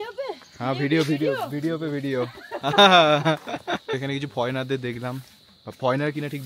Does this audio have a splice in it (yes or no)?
yes